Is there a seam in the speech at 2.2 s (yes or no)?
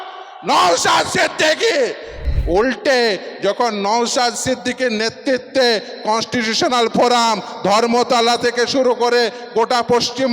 yes